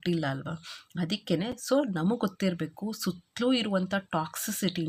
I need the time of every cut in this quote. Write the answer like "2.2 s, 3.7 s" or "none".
none